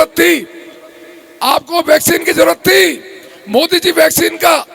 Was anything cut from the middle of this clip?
no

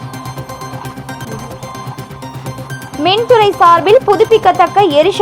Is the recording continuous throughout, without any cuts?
no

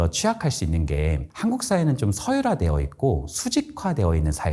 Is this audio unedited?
yes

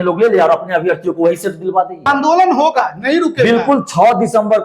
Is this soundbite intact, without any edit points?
no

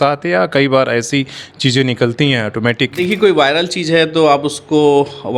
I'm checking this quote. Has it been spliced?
yes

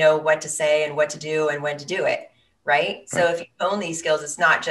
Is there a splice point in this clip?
no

